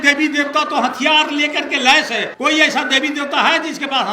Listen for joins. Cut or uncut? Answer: cut